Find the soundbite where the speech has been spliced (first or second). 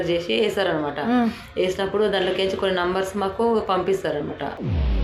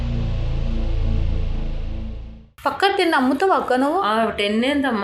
second